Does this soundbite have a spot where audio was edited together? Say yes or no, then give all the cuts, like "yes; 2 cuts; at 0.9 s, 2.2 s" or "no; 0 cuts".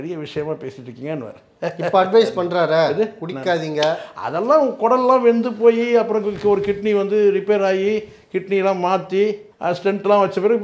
yes; 1 cut; at 9.5 s